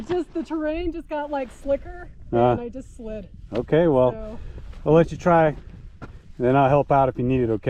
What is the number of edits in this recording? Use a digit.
0